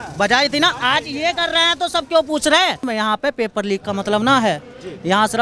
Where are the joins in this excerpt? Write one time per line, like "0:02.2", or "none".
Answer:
0:02.8